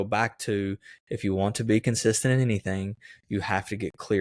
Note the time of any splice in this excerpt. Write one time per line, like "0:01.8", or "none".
none